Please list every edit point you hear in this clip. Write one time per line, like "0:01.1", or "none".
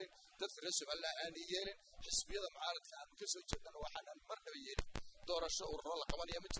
none